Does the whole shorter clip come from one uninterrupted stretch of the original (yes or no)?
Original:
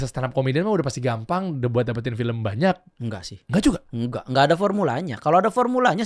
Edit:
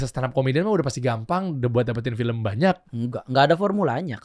no